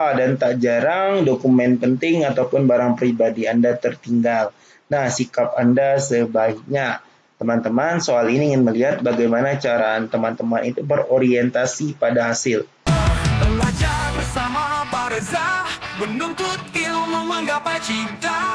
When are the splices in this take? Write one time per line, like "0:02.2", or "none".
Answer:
0:12.7